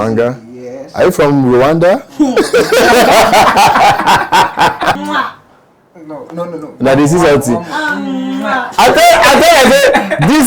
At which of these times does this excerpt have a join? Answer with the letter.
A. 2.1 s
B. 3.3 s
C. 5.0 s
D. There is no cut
C